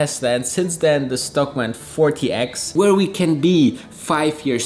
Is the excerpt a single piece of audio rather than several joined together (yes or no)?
no